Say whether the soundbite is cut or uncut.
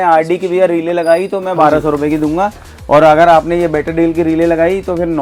uncut